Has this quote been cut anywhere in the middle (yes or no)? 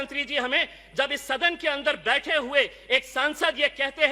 no